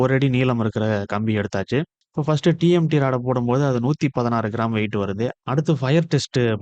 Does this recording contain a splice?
yes; 1 cut; at 5.4 s

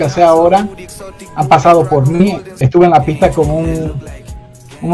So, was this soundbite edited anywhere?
yes; 1 cut; at 2.5 s

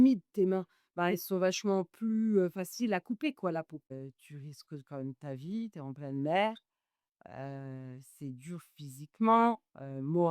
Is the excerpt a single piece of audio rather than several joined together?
no; 1 cut; at 3.9 s

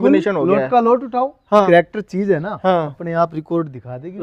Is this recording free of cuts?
no; 1 cut; at 1.7 s

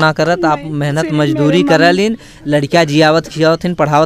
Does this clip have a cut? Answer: no; 0 cuts

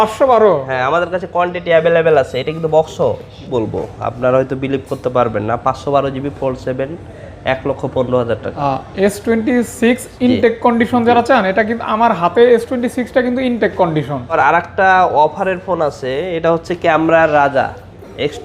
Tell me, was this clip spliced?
yes; 3 cuts; at 3.4 s, 8.6 s, 14.3 s

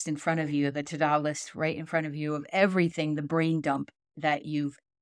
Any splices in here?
yes; 1 cut; at 4.0 s

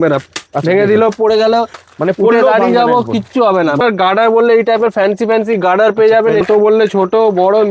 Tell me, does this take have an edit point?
yes; 2 cuts; at 3.8 s, 6.4 s

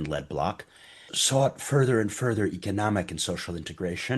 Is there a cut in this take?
yes; 1 cut; at 1.2 s

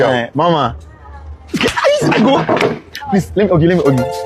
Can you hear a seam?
no; 0 cuts

